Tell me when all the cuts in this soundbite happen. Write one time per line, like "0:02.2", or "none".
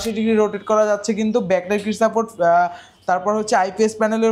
none